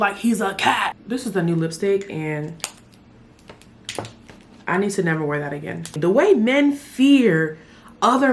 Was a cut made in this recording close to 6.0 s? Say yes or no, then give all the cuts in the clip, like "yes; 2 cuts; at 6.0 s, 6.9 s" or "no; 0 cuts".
yes; 2 cuts; at 1.0 s, 6.0 s